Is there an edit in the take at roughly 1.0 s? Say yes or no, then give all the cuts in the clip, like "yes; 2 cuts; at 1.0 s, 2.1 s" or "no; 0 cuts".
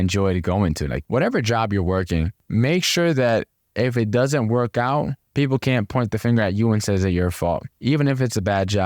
yes; 2 cuts; at 1.0 s, 7.7 s